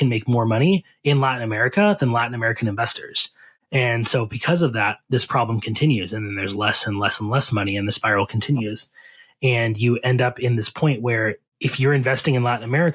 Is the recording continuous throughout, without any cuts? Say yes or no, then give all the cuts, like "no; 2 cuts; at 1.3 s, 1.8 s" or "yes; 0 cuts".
yes; 0 cuts